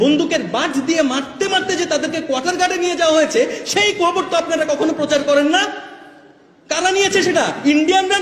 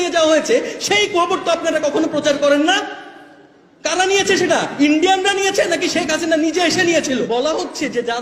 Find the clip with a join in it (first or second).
second